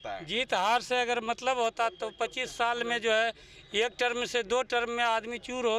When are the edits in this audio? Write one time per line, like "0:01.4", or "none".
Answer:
none